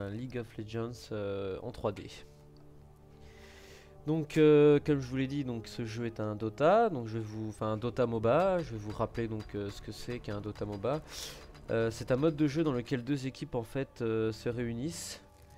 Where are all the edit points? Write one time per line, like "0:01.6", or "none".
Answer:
0:02.2